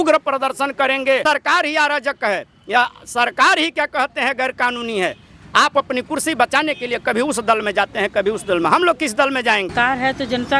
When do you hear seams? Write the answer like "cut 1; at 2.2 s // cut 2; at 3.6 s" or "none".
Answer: cut 1; at 1.2 s // cut 2; at 9.7 s